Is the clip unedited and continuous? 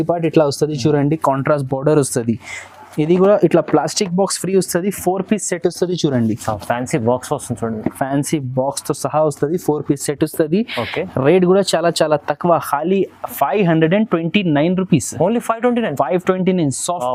yes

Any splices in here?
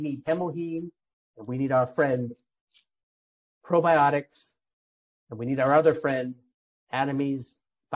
no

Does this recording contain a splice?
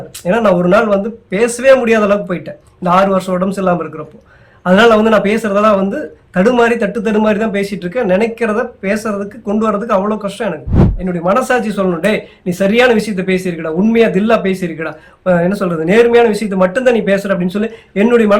yes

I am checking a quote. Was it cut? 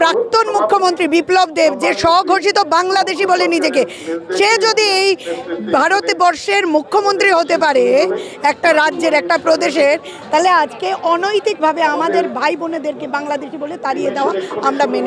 no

